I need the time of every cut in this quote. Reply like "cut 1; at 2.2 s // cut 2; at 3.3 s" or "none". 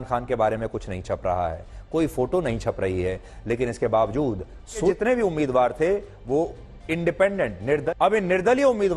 cut 1; at 4.9 s // cut 2; at 7.8 s